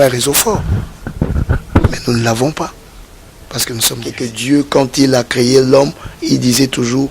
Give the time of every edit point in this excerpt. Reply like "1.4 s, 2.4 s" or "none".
4.3 s